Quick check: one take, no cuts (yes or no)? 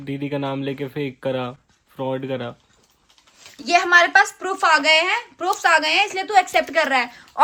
yes